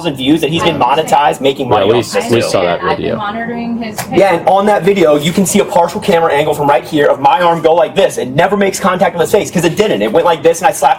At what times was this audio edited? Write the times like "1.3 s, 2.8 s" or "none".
none